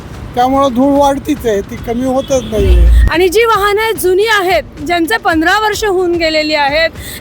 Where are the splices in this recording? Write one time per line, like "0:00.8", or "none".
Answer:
0:02.9